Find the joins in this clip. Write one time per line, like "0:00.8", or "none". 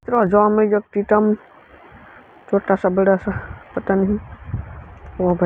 none